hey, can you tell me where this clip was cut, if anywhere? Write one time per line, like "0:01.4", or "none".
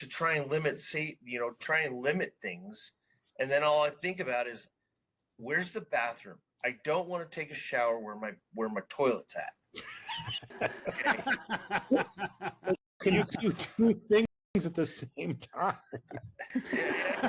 none